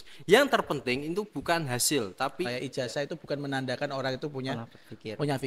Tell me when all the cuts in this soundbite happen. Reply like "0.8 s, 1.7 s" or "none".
2.5 s